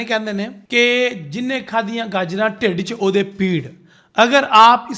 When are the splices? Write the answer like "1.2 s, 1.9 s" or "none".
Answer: none